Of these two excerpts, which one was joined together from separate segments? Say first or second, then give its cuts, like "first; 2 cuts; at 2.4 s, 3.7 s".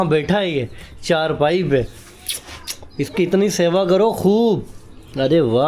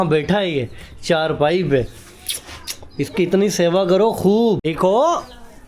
second; 1 cut; at 4.7 s